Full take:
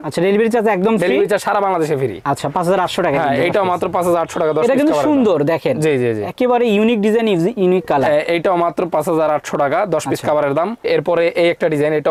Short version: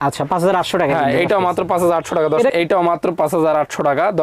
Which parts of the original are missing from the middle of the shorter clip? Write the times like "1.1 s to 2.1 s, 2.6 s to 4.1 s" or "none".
4.7 s to 8.2 s